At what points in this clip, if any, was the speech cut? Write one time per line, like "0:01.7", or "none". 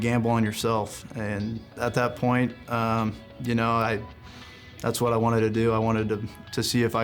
0:01.7